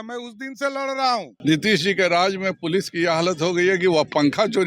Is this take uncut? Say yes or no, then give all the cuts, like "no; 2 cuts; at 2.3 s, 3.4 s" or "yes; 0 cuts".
no; 1 cut; at 1.3 s